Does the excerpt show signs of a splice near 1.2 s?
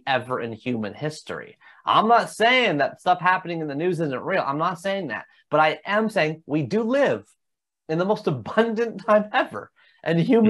no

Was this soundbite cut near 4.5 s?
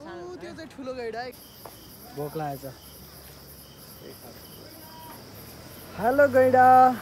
no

